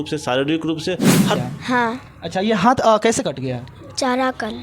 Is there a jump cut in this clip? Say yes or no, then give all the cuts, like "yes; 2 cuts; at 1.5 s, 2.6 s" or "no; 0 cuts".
yes; 1 cut; at 1.4 s